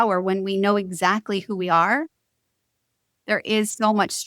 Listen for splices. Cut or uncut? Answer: uncut